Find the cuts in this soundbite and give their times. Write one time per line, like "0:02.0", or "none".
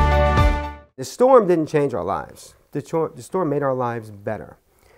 0:01.0